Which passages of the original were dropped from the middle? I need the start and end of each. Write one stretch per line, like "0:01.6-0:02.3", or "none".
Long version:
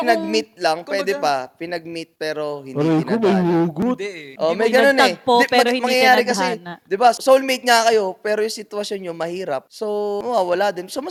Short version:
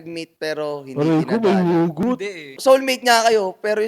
0:04.4-0:07.2